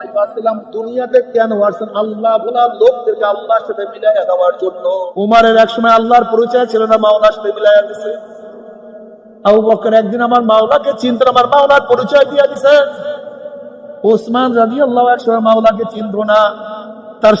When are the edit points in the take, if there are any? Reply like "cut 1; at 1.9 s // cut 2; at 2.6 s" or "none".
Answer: cut 1; at 5.1 s